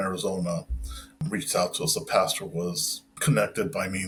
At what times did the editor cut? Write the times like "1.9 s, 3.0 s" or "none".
none